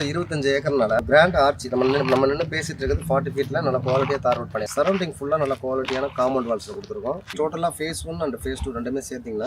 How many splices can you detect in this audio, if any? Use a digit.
3